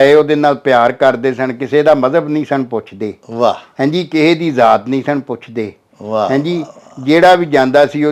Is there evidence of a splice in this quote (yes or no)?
no